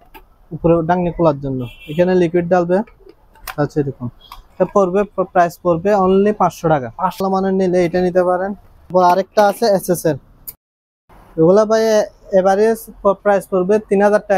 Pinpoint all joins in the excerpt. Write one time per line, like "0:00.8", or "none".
0:07.2
0:08.9
0:10.5